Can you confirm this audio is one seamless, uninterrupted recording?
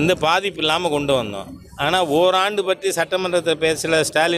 yes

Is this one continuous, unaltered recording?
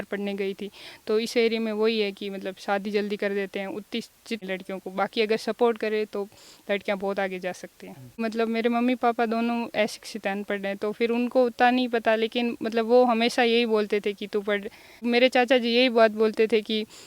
no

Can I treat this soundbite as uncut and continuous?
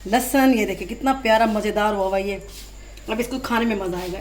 yes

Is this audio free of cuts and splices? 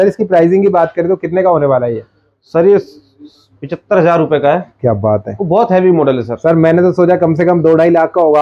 yes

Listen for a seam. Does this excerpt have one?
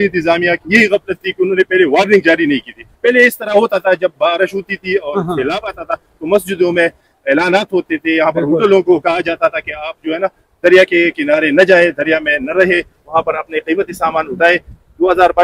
no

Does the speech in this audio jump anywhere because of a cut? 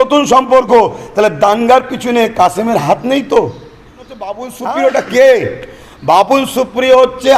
yes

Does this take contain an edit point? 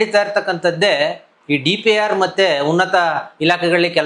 no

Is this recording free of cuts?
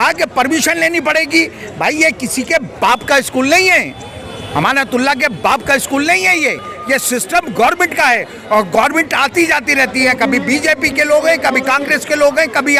yes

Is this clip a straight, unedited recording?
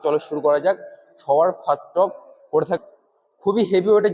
no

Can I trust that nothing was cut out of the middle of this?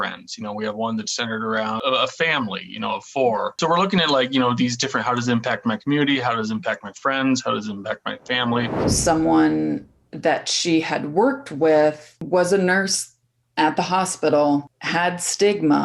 no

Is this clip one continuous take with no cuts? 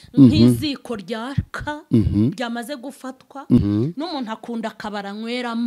no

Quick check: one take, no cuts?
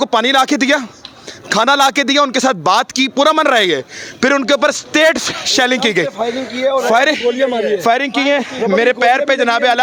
yes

